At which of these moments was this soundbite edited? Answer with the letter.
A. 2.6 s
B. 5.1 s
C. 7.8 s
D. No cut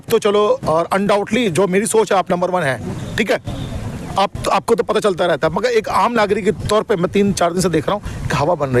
D